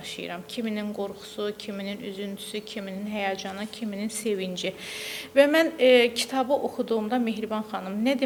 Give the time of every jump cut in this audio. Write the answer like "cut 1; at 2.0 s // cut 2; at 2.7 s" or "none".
none